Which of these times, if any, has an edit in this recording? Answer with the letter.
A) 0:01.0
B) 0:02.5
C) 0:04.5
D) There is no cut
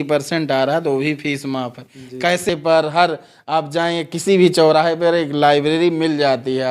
B